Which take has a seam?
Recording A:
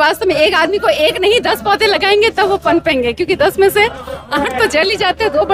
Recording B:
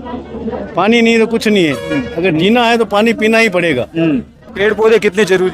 B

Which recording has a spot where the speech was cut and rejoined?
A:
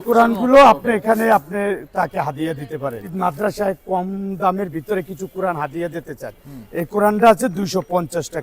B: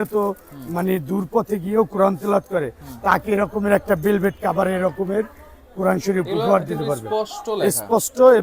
A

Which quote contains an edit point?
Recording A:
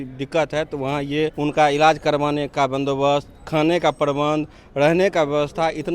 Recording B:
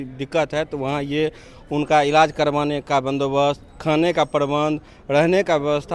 A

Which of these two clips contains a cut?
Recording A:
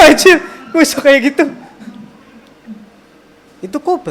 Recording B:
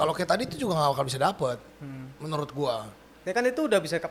A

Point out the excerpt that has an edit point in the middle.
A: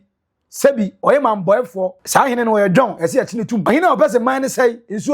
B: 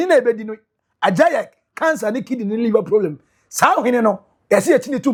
A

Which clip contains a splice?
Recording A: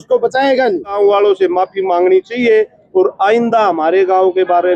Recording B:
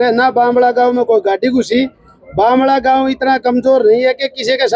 A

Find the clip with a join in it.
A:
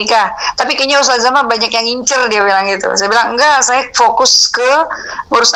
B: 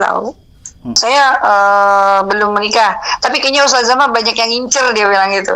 B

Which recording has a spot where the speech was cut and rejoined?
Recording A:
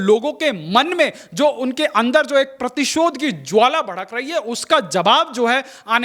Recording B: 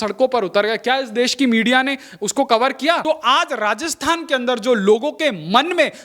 B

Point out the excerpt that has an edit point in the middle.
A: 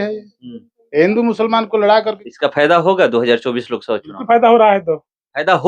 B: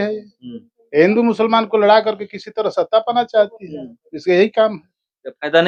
A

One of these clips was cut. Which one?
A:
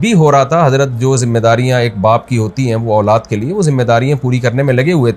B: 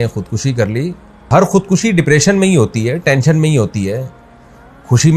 B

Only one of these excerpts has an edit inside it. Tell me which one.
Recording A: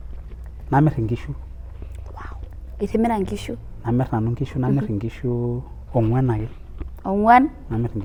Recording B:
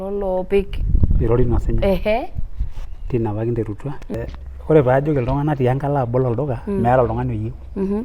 B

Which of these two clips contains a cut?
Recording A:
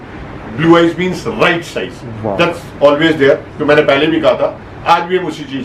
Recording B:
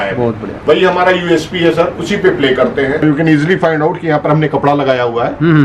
B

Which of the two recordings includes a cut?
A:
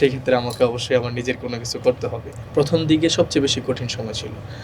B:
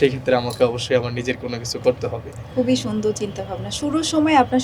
A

